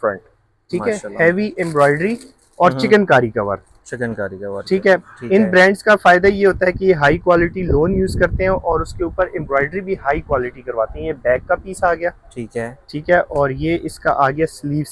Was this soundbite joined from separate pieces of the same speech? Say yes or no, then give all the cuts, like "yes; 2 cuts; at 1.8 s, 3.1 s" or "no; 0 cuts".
no; 0 cuts